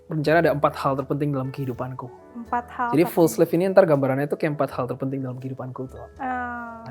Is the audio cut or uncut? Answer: uncut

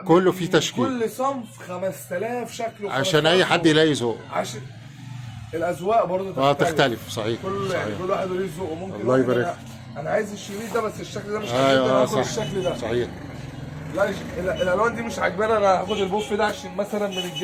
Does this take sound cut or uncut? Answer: uncut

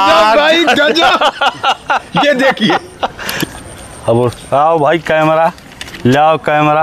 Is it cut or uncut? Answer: cut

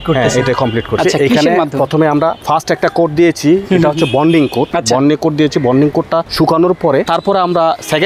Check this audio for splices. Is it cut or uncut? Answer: cut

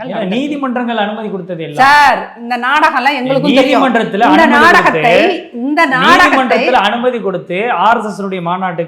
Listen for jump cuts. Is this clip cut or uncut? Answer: uncut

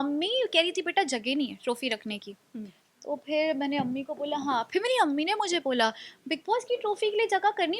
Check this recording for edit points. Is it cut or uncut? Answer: uncut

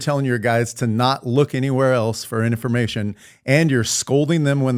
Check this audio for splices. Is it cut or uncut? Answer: uncut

